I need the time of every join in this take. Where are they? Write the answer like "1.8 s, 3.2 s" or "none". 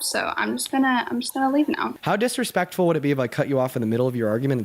1.9 s